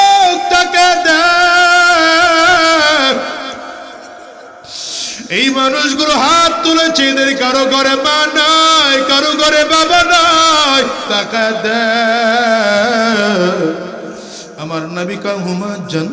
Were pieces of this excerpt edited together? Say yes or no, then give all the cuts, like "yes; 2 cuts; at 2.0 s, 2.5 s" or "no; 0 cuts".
yes; 1 cut; at 11.1 s